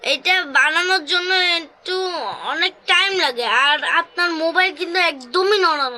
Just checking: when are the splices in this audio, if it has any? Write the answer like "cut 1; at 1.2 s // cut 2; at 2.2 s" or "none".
none